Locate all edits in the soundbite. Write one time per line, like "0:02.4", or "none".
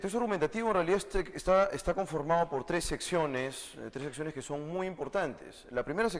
0:02.6